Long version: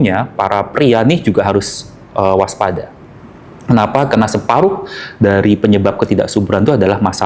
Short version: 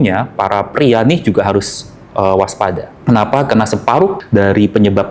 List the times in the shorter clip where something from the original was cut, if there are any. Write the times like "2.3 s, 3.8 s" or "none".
2.9 s, 4.2 s